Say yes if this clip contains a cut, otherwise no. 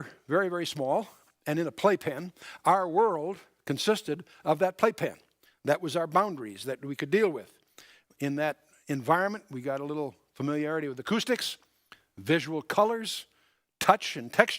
yes